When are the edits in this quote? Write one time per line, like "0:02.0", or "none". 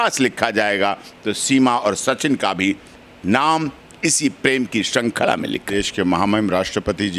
0:05.7